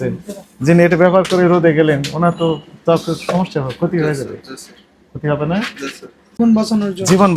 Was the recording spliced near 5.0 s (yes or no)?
no